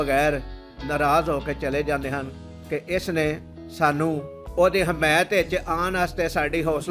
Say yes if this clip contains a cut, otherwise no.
yes